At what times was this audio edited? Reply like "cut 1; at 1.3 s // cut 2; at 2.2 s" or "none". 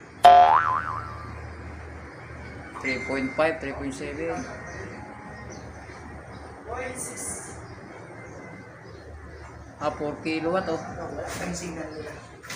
cut 1; at 1.0 s